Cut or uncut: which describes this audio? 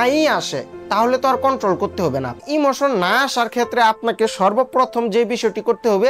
cut